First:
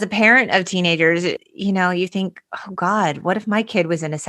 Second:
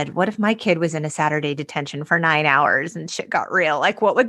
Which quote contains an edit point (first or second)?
first